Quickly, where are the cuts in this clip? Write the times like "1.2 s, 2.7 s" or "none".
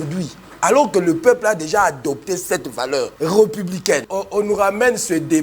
3.1 s, 4.1 s